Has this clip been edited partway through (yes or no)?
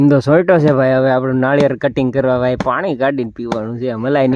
no